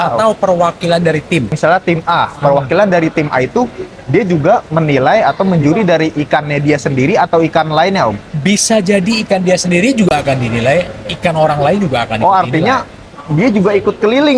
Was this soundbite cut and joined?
yes; 1 cut; at 1.5 s

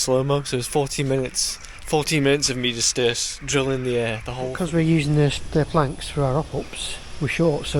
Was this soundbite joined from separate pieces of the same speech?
yes; 1 cut; at 4.5 s

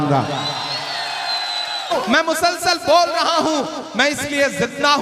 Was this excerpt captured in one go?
no; 1 cut; at 1.8 s

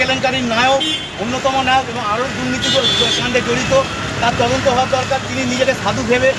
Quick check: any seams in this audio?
no; 0 cuts

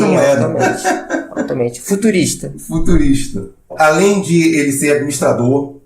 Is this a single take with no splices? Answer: no; 1 cut; at 3.7 s

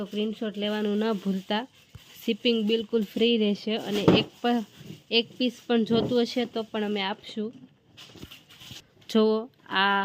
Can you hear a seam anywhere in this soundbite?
no; 0 cuts

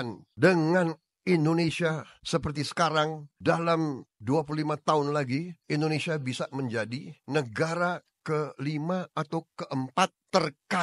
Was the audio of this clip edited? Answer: no; 0 cuts

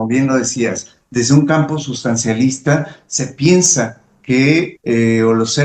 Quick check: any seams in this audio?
yes; 1 cut; at 4.7 s

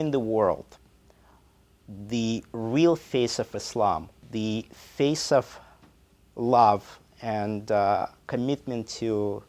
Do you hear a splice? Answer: yes; 1 cut; at 4.2 s

